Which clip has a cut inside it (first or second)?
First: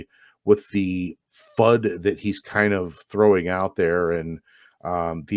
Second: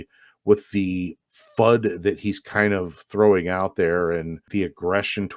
second